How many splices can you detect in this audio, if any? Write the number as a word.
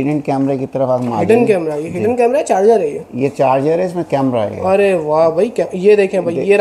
zero